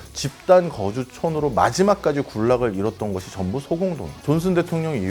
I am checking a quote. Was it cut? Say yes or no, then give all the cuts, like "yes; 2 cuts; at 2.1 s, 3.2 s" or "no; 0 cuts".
yes; 1 cut; at 4.1 s